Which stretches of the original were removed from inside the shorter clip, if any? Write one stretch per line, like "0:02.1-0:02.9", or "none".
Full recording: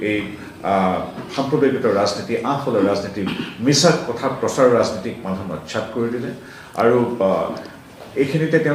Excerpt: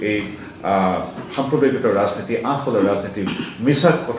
none